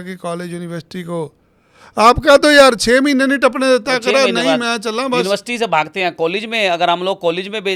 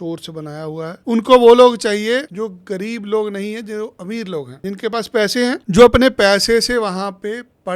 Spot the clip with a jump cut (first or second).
second